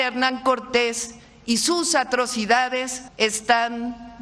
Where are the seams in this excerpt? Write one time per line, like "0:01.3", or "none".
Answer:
0:03.0